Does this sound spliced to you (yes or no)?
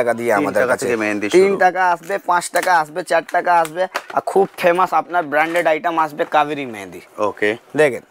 no